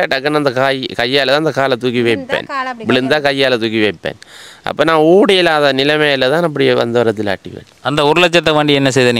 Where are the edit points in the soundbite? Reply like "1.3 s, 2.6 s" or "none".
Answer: none